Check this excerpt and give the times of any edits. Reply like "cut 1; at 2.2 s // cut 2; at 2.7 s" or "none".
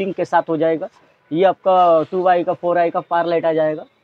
none

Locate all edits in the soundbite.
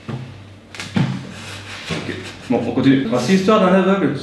cut 1; at 3.0 s

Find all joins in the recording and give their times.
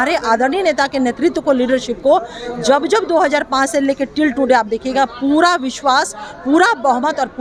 none

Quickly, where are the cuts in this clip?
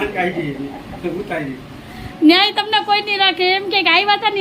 cut 1; at 2.1 s

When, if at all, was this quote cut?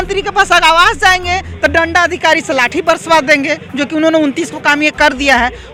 none

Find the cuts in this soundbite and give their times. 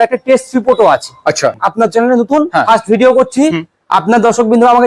cut 1; at 1.6 s

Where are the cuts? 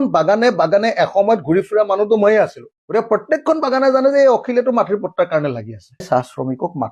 cut 1; at 6.0 s

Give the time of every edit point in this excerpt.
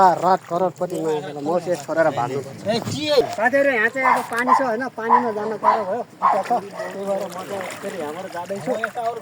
cut 1; at 3.2 s

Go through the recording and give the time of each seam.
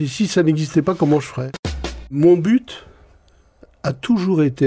cut 1; at 2.1 s

